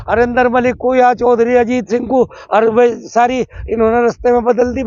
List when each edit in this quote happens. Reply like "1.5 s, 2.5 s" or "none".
none